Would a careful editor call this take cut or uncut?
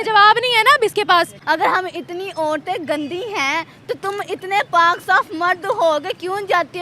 cut